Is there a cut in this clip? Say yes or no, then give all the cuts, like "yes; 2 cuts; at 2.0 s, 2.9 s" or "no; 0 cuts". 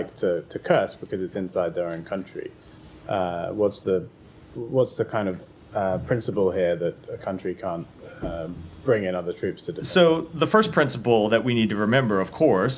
no; 0 cuts